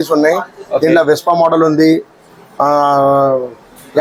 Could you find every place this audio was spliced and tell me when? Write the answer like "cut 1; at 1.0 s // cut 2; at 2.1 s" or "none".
none